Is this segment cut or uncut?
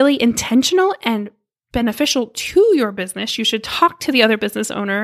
uncut